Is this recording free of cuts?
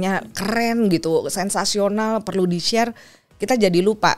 yes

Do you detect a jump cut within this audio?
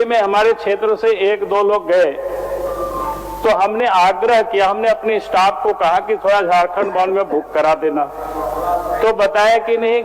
no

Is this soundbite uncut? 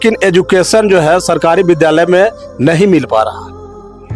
yes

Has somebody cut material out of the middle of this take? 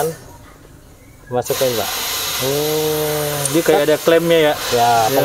no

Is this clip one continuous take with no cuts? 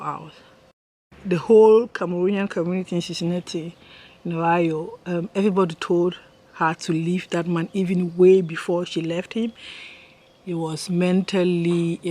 no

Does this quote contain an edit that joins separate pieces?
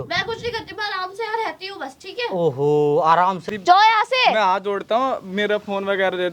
yes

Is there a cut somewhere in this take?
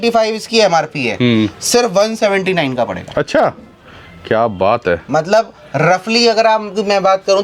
no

